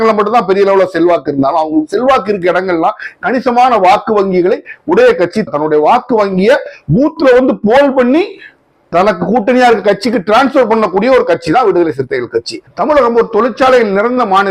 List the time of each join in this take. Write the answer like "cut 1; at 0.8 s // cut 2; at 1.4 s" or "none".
cut 1; at 12.7 s